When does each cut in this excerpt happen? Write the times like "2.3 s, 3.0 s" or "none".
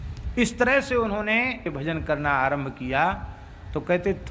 1.7 s